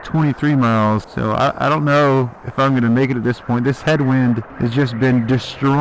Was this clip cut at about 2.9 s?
no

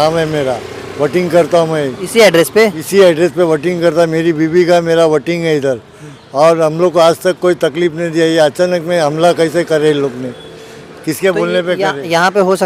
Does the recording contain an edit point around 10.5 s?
no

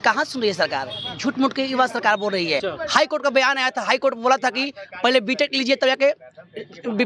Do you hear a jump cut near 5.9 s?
no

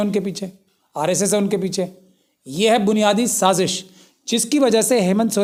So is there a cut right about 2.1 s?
no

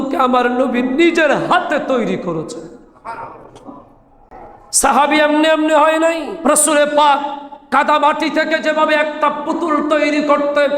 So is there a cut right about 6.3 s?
yes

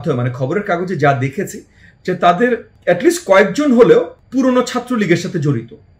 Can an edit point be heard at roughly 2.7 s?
yes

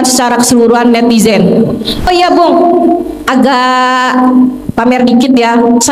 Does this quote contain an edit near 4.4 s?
no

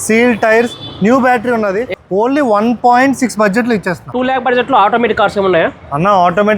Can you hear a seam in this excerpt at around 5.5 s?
no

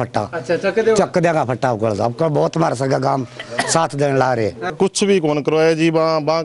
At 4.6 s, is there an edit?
yes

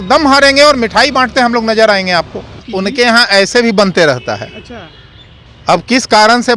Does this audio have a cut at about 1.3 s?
no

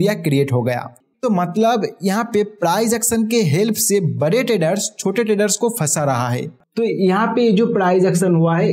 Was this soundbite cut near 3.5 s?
no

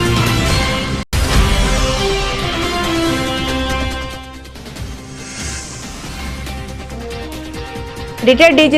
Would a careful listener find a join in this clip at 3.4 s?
no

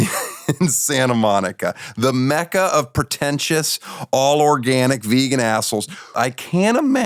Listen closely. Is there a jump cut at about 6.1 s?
yes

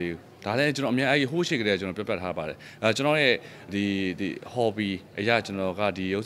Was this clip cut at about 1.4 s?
no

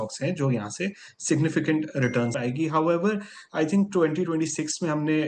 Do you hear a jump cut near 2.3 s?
yes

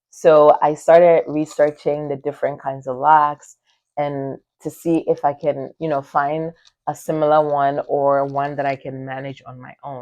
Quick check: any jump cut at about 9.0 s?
no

